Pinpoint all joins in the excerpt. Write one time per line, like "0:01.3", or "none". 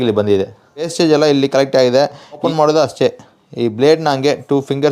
0:00.9
0:02.4

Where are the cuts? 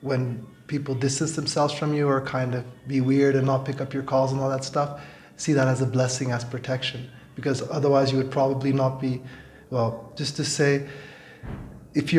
none

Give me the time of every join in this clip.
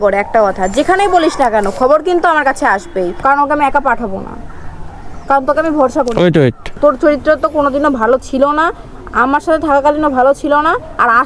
0:03.1
0:06.8

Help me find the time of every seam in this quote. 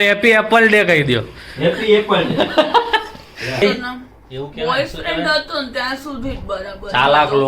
0:03.6

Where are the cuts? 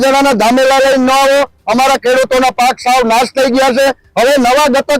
none

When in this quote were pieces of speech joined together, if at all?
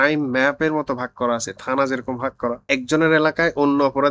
0:02.6

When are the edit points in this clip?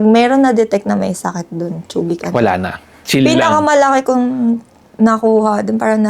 0:03.0

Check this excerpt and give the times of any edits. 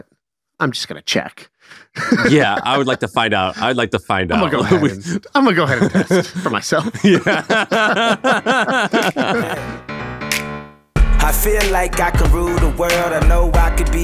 0:09.7

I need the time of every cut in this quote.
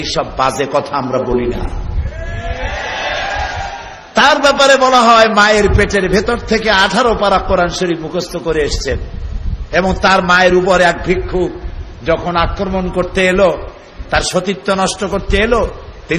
none

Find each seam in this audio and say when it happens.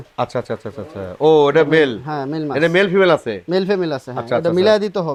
none

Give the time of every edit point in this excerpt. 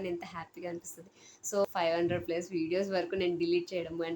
0:01.6

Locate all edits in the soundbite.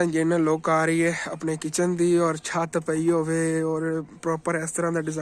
none

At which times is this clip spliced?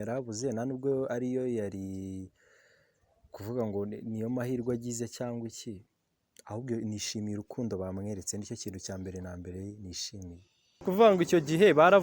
0:10.8

